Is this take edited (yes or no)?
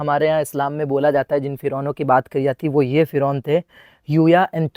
no